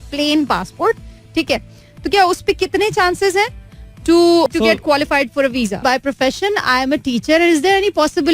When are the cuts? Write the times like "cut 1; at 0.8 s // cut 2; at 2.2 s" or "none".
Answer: cut 1; at 4.5 s // cut 2; at 5.8 s